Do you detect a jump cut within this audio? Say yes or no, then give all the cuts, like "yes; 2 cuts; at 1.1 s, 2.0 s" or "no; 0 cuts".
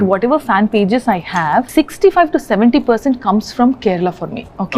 yes; 1 cut; at 1.7 s